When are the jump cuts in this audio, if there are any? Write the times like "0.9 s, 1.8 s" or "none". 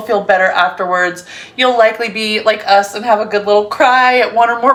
none